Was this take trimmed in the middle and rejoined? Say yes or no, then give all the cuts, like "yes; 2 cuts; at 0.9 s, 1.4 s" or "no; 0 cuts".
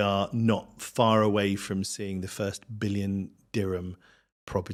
no; 0 cuts